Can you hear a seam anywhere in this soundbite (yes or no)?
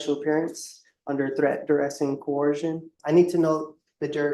yes